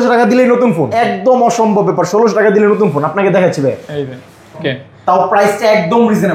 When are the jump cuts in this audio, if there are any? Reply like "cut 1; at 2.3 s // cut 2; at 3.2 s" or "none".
cut 1; at 0.9 s // cut 2; at 4.6 s